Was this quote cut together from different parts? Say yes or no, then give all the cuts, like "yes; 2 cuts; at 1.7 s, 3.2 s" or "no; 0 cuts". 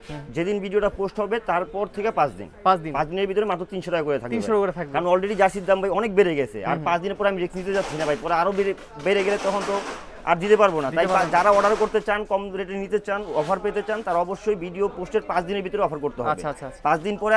no; 0 cuts